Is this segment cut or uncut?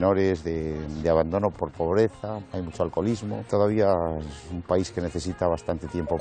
cut